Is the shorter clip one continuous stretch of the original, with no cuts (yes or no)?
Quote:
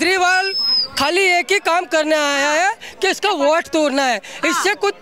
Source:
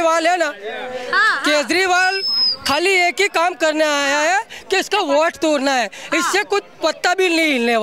yes